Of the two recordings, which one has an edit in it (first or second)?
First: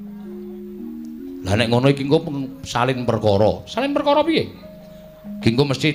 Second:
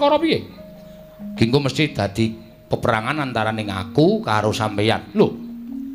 second